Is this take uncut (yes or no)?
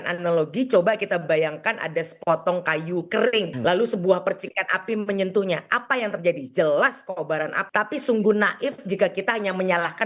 no